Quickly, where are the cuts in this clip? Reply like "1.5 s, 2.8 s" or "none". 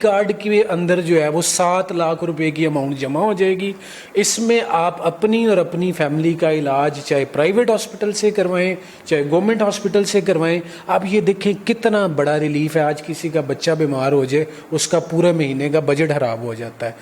none